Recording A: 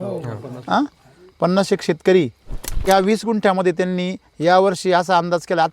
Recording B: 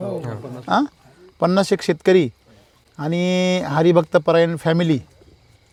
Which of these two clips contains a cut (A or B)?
A